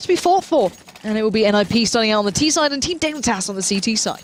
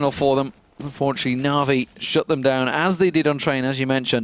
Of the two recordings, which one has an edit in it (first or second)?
second